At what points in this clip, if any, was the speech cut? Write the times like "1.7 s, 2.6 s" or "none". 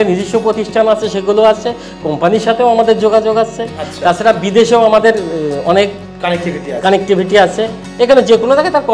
none